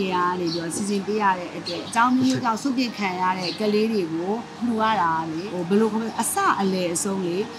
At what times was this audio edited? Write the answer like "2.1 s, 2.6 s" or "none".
1.8 s, 3.5 s, 4.5 s, 5.5 s